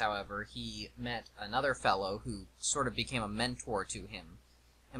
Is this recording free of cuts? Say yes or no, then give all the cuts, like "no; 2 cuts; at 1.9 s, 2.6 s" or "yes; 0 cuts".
no; 1 cut; at 3.0 s